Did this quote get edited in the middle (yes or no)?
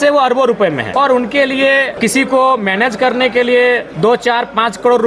yes